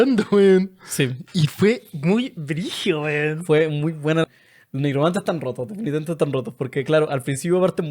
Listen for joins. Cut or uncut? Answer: cut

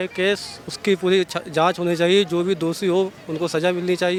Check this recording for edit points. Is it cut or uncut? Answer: uncut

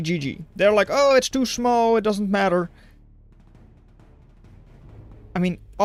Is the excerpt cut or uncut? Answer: uncut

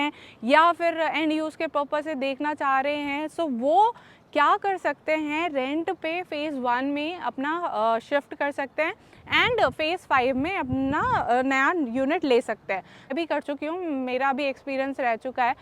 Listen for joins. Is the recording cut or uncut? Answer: cut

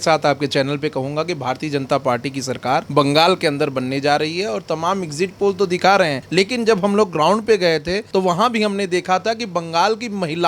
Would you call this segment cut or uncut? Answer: cut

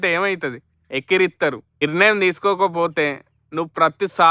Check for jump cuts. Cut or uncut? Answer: cut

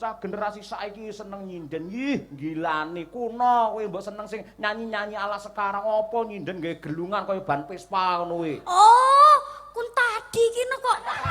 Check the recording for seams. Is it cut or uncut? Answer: uncut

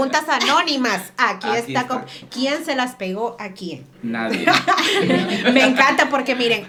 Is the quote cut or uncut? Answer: uncut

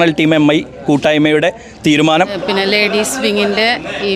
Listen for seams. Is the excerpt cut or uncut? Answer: cut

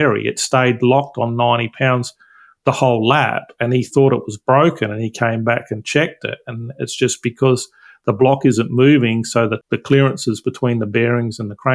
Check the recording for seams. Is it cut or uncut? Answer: cut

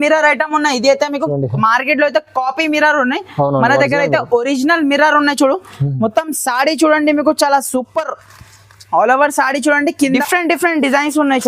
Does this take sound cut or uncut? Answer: cut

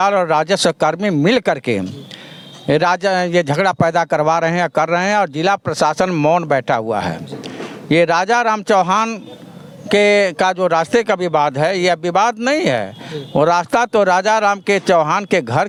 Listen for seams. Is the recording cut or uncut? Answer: uncut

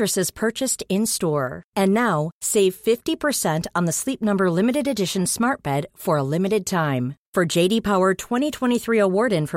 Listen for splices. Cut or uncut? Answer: uncut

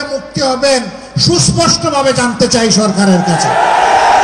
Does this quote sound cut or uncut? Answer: uncut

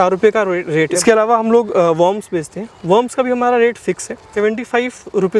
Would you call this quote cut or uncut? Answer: cut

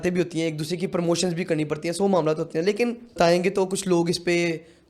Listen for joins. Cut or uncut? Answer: cut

